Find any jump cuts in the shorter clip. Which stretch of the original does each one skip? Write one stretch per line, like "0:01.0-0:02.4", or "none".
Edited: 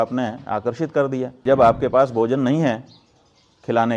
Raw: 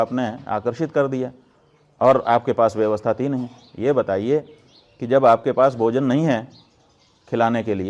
0:01.3-0:05.0